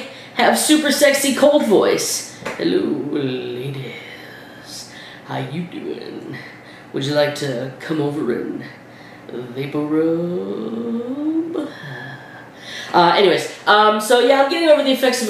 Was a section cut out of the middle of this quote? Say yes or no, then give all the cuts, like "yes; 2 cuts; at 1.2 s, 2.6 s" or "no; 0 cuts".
no; 0 cuts